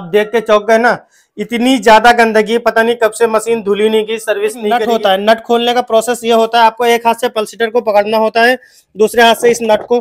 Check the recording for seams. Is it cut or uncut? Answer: cut